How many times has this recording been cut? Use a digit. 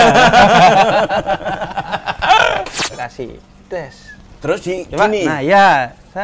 1